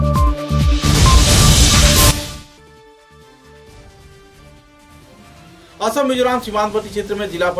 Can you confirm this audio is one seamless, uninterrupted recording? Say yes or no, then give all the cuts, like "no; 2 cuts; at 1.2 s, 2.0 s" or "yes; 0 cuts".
no; 1 cut; at 4.9 s